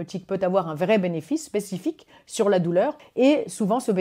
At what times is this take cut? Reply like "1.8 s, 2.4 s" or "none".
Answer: 3.0 s

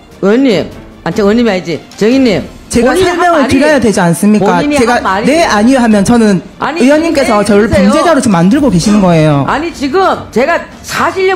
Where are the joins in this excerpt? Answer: 2.5 s

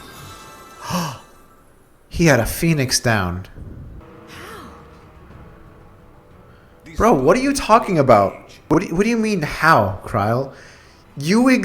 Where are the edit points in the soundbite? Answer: 4.0 s, 8.5 s

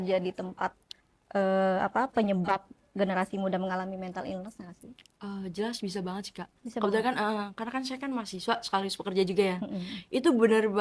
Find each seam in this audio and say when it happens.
none

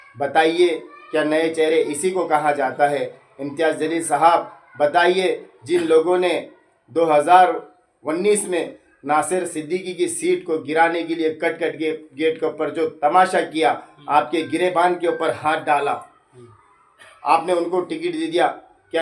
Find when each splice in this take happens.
none

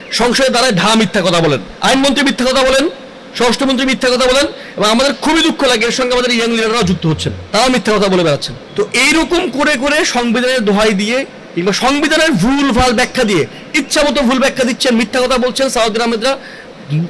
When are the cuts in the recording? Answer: 1.7 s, 7.3 s, 8.6 s

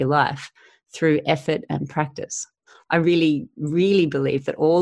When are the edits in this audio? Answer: 2.7 s

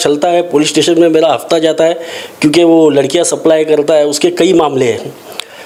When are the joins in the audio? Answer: none

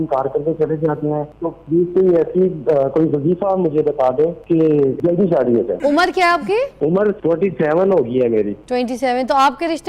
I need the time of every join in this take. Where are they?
1.3 s, 4.8 s, 5.7 s, 7.0 s, 8.6 s

